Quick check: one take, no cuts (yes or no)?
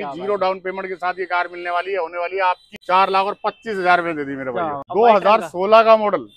yes